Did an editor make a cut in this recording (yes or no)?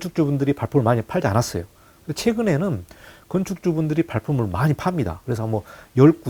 no